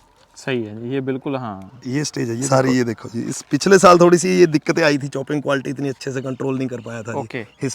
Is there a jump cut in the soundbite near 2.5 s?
yes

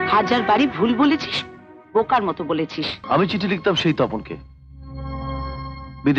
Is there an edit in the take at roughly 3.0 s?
yes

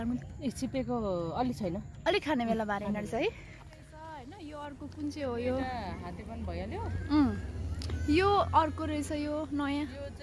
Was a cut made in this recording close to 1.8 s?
no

